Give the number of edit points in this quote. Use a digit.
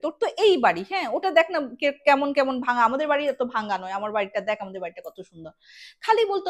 0